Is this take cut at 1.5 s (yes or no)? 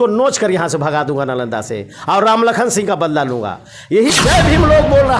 no